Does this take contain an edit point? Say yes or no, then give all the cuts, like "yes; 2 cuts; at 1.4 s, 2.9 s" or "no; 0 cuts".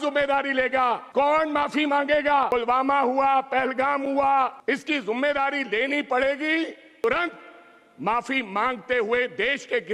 yes; 4 cuts; at 1.0 s, 2.5 s, 4.6 s, 7.0 s